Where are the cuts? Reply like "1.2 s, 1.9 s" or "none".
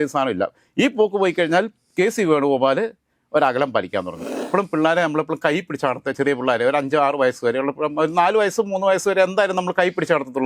4.4 s